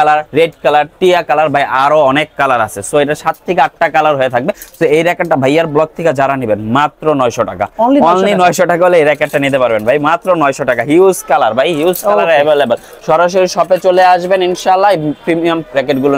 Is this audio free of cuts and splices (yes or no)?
yes